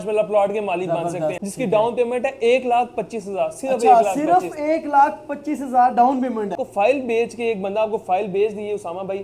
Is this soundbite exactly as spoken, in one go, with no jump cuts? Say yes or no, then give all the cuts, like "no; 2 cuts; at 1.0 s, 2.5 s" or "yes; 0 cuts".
no; 2 cuts; at 1.4 s, 6.6 s